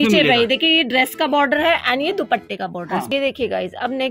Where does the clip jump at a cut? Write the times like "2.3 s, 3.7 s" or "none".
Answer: 3.1 s